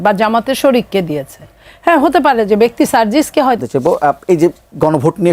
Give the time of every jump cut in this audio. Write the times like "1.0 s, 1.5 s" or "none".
3.6 s